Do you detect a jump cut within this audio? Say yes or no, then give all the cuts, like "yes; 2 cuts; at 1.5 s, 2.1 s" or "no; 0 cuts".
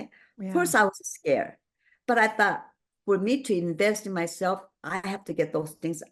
no; 0 cuts